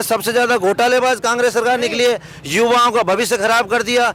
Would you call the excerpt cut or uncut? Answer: uncut